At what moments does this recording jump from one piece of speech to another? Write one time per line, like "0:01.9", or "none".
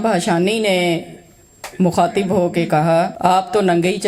0:03.1